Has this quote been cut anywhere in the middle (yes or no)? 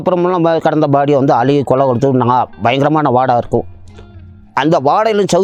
no